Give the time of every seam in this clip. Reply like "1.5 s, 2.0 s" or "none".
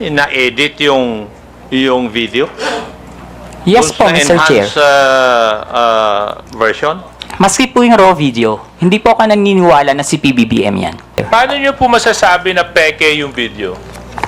11.2 s